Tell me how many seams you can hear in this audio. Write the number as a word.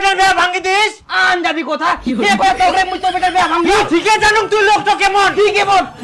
one